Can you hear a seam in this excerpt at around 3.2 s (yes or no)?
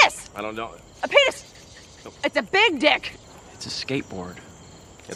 yes